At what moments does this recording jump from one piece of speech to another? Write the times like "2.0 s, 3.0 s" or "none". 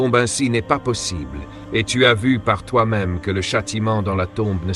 none